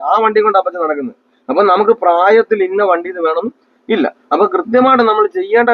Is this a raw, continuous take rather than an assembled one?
yes; 0 cuts

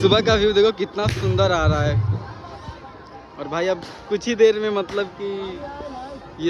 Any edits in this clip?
no; 0 cuts

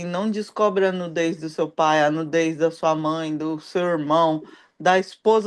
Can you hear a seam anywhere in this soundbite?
no; 0 cuts

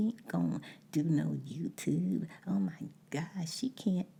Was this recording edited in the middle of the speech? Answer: no; 0 cuts

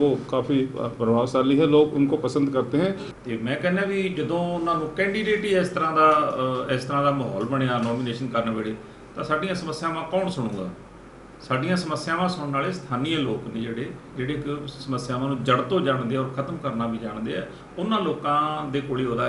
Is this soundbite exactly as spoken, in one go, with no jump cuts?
no; 1 cut; at 3.1 s

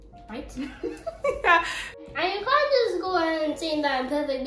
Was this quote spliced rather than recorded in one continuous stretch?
yes; 1 cut; at 1.9 s

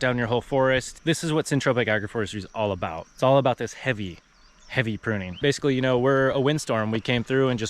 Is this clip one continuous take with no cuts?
no; 3 cuts; at 0.9 s, 3.0 s, 5.4 s

